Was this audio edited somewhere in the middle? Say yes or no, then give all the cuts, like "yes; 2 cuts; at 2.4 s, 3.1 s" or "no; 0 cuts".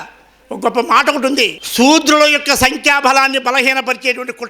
yes; 1 cut; at 1.6 s